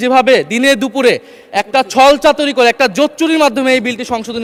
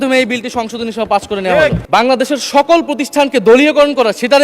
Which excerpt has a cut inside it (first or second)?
second